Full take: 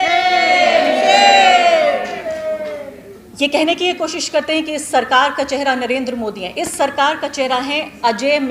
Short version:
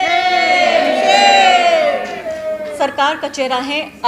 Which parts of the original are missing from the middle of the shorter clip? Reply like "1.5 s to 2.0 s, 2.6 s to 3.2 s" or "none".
2.7 s to 6.7 s